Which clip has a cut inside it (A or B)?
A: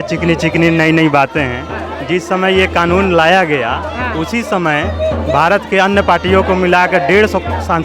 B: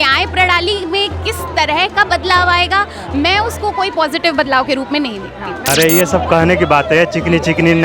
B